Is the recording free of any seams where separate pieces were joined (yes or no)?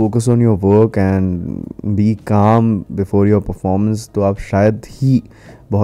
yes